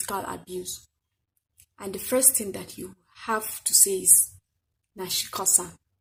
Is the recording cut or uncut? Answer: uncut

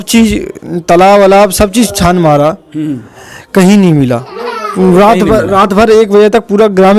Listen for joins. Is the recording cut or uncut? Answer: uncut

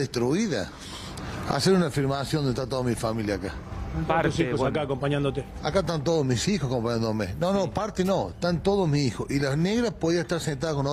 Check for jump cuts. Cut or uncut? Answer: uncut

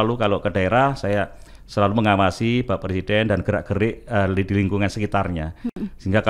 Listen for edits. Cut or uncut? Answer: uncut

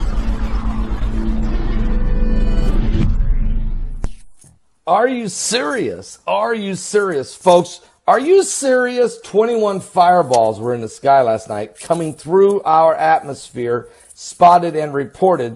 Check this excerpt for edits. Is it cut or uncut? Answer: uncut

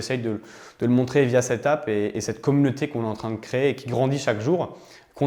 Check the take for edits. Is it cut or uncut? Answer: uncut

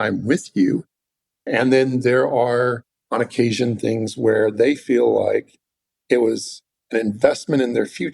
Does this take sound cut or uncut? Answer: uncut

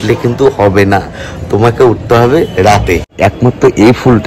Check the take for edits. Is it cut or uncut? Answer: cut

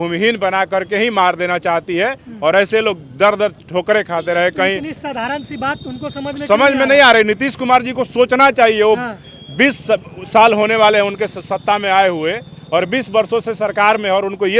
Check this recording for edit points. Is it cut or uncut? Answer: uncut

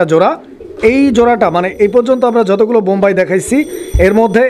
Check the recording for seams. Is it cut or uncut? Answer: uncut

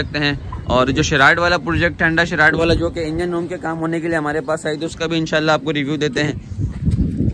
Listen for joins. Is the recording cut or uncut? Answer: uncut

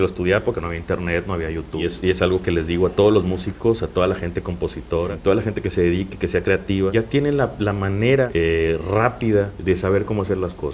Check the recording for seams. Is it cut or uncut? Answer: cut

